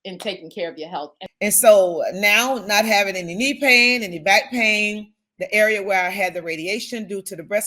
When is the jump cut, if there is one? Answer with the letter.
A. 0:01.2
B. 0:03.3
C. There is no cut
A